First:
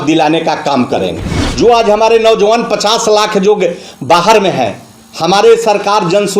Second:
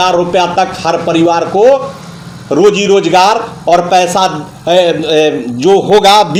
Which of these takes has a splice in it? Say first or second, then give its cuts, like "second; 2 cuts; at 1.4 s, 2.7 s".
first; 1 cut; at 1.2 s